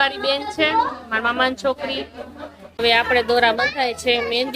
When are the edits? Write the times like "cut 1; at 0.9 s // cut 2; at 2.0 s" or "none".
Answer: cut 1; at 2.8 s